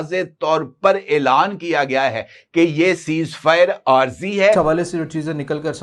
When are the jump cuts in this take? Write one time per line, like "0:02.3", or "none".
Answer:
0:04.6